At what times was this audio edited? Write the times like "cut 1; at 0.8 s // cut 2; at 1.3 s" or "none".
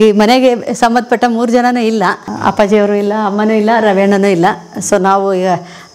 cut 1; at 2.3 s

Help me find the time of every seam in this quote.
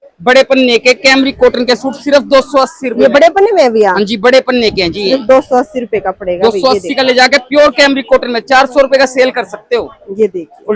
none

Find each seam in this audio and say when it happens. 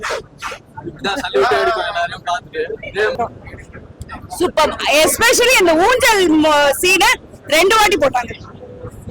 cut 1; at 3.2 s

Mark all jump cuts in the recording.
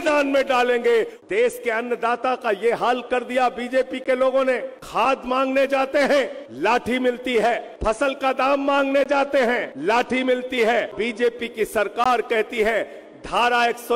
cut 1; at 1.1 s // cut 2; at 4.8 s // cut 3; at 6.4 s // cut 4; at 7.7 s // cut 5; at 9.7 s // cut 6; at 10.9 s

